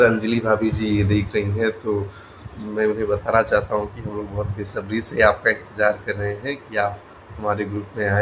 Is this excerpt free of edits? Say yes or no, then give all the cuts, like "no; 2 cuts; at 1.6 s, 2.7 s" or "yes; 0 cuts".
yes; 0 cuts